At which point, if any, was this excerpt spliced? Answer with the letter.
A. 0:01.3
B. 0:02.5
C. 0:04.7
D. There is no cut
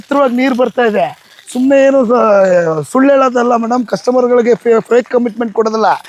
D